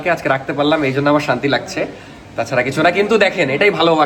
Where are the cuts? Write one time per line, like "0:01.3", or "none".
none